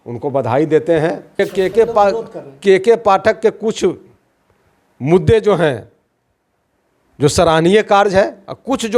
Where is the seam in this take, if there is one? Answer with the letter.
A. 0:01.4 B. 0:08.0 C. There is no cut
A